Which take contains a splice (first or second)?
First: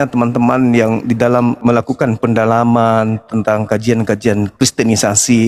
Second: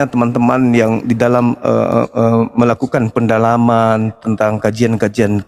first